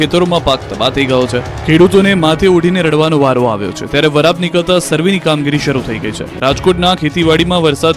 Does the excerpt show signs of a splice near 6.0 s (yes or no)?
no